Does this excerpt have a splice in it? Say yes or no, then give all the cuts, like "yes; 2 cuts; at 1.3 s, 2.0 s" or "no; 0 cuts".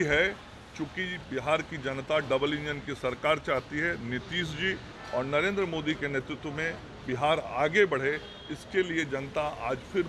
no; 0 cuts